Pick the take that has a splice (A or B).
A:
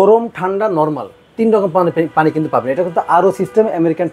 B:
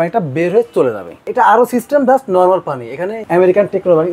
B